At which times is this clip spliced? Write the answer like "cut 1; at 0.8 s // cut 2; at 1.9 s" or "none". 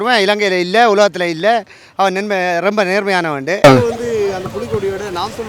cut 1; at 3.6 s